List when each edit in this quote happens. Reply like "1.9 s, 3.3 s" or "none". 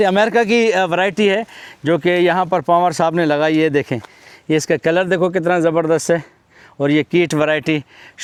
none